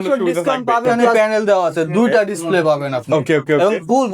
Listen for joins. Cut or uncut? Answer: cut